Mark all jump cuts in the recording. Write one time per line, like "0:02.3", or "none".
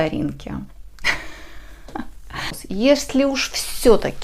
0:02.6